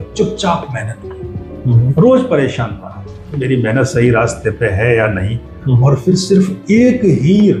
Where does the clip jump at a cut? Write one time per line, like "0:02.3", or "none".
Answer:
none